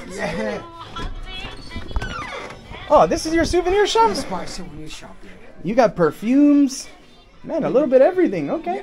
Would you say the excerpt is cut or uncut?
uncut